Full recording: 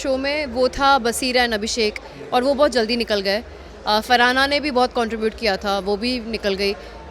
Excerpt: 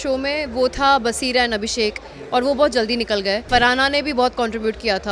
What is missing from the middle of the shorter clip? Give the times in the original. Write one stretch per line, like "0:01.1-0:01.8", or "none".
0:03.5-0:04.0